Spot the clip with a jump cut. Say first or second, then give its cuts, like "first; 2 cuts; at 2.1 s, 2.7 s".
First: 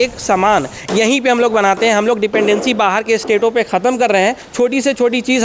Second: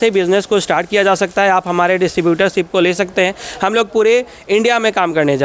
first; 1 cut; at 4.4 s